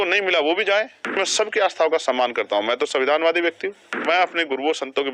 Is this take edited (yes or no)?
yes